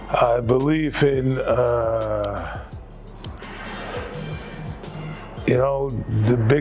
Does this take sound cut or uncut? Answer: uncut